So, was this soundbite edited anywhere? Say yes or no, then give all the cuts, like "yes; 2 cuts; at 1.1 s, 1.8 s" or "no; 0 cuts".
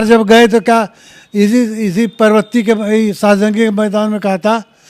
no; 0 cuts